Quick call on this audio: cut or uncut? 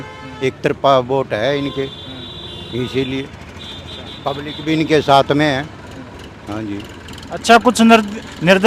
uncut